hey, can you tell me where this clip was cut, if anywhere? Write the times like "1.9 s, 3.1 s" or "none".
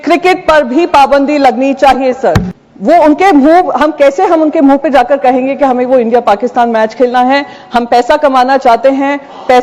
2.5 s